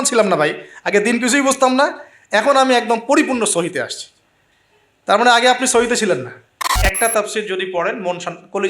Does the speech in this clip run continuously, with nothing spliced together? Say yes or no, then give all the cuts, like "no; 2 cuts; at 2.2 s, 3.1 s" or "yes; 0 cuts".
no; 1 cut; at 6.9 s